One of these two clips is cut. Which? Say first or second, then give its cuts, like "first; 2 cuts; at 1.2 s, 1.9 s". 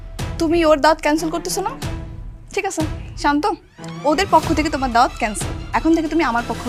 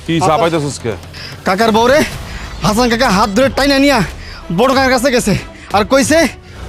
second; 1 cut; at 1.1 s